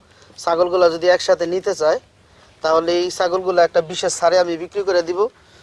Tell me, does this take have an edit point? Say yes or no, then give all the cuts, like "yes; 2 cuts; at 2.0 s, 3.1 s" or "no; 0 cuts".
no; 0 cuts